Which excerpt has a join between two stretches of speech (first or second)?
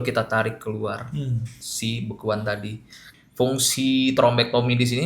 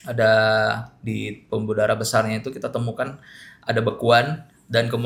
first